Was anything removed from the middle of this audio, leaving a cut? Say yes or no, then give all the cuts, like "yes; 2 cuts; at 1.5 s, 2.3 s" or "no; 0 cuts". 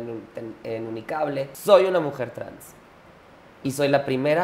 yes; 1 cut; at 1.5 s